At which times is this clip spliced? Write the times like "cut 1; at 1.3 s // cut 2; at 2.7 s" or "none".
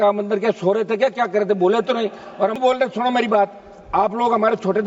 cut 1; at 2.6 s